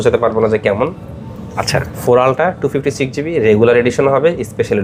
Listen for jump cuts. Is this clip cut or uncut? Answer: uncut